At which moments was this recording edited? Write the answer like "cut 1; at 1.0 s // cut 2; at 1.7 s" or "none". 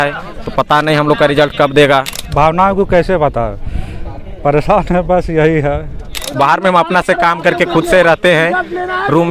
cut 1; at 2.2 s // cut 2; at 6.2 s